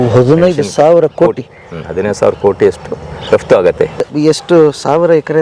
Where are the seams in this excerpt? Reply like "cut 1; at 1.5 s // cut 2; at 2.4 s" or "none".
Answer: cut 1; at 4.0 s